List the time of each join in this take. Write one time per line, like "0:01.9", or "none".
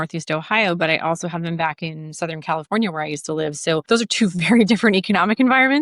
0:03.8